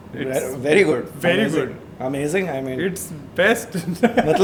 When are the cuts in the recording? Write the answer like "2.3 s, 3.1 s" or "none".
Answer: none